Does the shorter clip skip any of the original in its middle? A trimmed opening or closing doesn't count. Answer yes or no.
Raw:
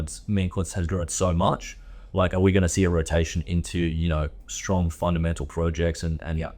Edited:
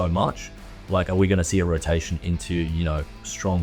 no